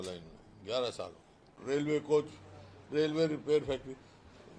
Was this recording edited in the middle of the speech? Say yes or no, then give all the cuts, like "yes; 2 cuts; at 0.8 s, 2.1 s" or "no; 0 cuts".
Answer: yes; 1 cut; at 1.5 s